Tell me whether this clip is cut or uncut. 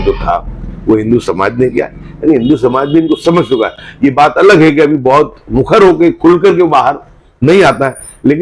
uncut